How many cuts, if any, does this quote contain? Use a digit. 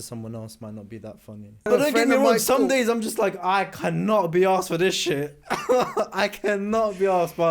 1